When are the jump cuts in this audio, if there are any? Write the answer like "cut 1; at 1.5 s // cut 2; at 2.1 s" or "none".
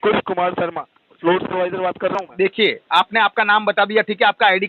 none